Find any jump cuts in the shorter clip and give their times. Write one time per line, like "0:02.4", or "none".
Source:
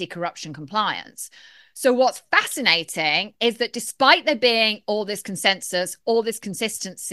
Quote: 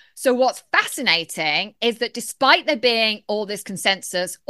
none